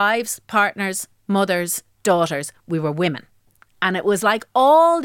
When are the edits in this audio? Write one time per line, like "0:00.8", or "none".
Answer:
none